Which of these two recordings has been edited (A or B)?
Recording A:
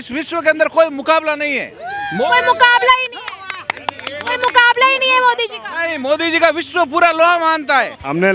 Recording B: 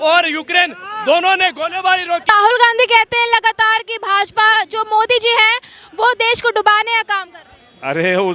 B